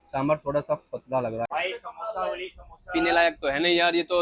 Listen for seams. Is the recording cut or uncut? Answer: cut